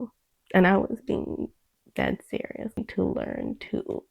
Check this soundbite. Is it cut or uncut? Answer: cut